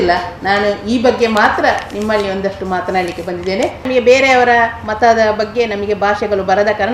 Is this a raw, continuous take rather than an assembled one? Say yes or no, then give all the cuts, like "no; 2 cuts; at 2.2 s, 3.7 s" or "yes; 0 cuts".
no; 1 cut; at 3.9 s